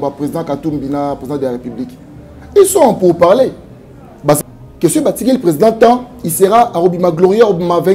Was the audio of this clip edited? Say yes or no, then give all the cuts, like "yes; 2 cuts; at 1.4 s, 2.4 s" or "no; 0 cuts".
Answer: yes; 1 cut; at 4.4 s